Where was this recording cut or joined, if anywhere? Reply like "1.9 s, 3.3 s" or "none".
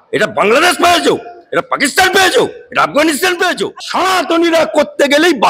3.8 s